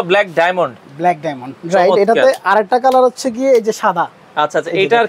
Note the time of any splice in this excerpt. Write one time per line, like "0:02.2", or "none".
none